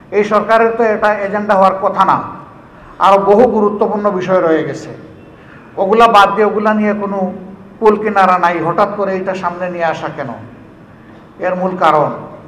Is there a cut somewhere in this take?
no; 0 cuts

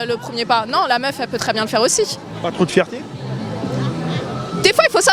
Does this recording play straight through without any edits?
yes; 0 cuts

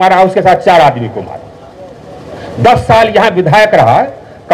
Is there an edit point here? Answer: no; 0 cuts

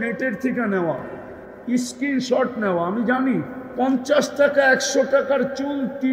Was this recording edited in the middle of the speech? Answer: yes; 1 cut; at 3.6 s

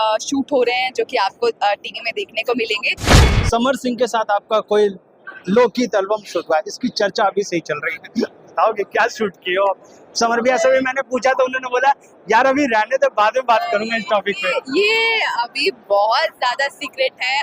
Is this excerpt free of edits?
no; 1 cut; at 3.2 s

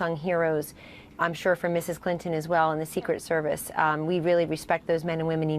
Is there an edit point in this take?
yes; 1 cut; at 2.4 s

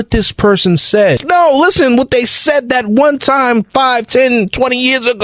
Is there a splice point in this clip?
yes; 1 cut; at 1.2 s

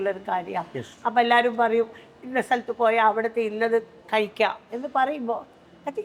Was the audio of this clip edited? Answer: no; 0 cuts

